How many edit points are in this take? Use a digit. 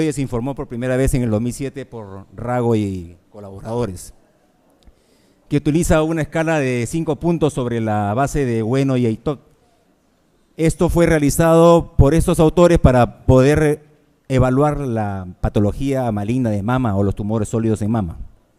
1